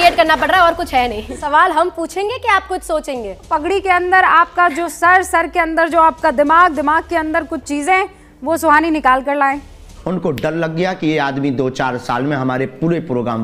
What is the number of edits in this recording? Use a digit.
3